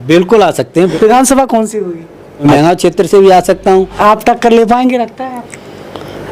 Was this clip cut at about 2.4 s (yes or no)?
yes